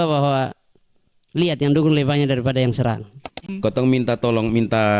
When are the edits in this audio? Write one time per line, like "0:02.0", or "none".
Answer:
0:03.5

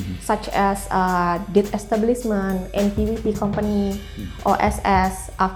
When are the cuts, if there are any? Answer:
none

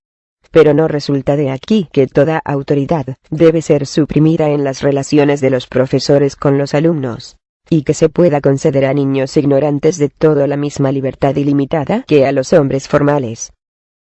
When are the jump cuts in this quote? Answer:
none

